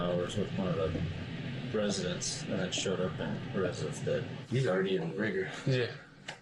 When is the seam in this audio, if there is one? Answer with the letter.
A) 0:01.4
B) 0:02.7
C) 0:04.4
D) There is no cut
C